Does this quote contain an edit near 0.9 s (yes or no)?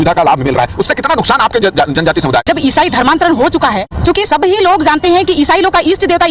no